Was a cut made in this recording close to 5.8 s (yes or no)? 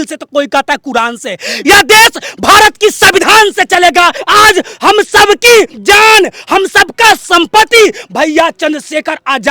yes